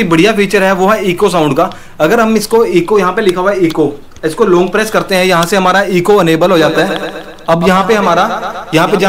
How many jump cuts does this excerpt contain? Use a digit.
0